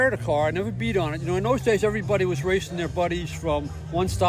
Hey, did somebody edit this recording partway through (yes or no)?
no